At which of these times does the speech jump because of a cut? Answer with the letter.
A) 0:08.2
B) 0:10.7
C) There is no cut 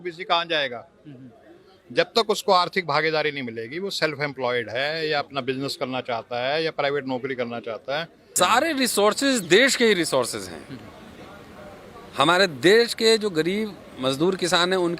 A